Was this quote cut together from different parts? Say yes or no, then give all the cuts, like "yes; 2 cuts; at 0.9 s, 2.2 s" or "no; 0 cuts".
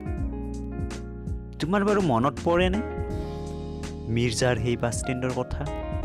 yes; 1 cut; at 0.9 s